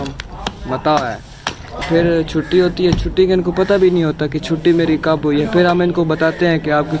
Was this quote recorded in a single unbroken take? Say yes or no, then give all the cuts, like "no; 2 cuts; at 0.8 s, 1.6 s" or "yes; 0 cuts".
no; 1 cut; at 1.8 s